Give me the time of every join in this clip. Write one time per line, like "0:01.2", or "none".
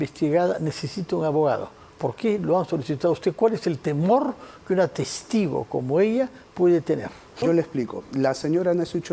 0:07.4